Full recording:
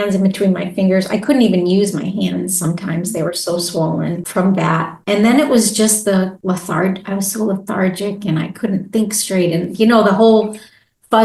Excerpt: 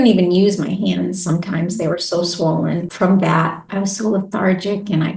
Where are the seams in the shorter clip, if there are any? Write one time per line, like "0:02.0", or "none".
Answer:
0:03.6